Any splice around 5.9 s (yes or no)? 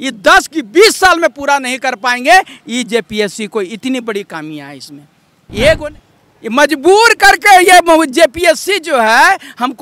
yes